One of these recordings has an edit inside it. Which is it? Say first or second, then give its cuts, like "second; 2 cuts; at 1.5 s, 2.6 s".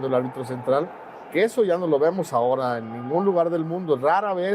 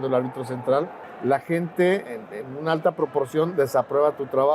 second; 1 cut; at 1.0 s